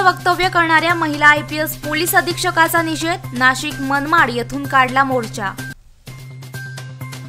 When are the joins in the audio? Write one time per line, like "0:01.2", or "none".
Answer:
none